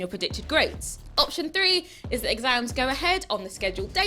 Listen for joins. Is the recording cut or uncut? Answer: cut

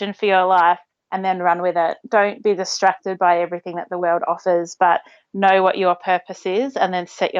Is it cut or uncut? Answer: uncut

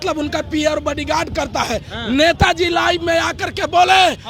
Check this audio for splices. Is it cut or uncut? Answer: uncut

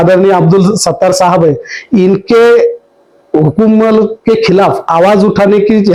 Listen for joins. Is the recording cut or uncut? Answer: uncut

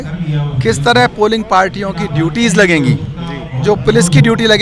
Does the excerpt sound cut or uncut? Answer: uncut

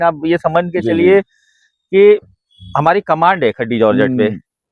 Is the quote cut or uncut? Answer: uncut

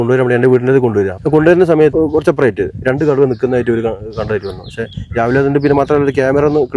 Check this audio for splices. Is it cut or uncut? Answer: cut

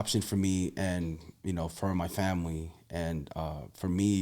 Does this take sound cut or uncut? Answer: uncut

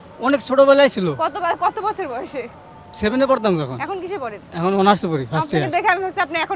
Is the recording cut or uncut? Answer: uncut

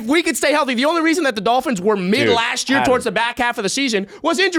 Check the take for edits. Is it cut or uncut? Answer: uncut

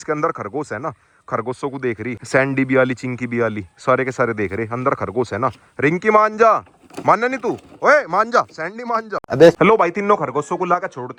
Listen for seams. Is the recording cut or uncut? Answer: uncut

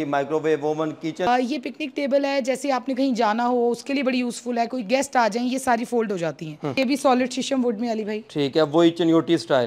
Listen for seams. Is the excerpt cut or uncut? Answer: cut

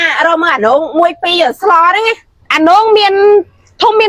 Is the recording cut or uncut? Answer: cut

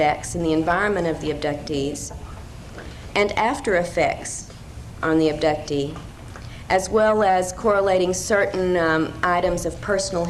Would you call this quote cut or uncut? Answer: cut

